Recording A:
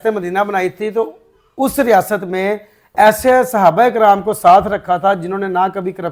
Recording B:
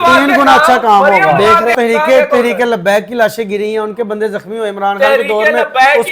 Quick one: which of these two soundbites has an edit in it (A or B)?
B